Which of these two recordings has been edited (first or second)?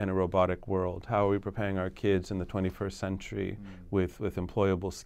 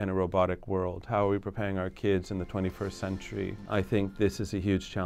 second